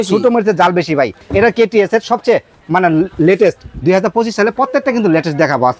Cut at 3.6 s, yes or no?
no